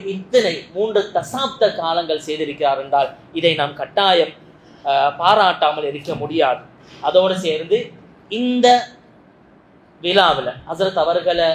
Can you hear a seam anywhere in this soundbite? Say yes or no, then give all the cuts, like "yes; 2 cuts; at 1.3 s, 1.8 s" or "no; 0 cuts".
no; 0 cuts